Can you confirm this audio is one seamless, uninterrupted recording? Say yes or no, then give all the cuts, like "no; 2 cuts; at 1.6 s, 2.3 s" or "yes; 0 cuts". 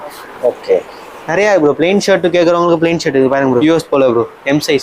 no; 1 cut; at 3.6 s